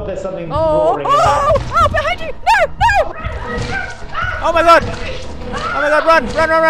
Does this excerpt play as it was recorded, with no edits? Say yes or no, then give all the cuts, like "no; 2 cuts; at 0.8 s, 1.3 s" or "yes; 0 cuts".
yes; 0 cuts